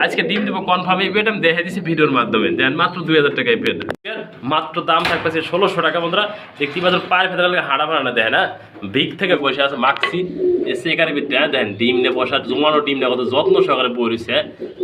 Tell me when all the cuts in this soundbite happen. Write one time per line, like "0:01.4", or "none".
0:04.3
0:09.4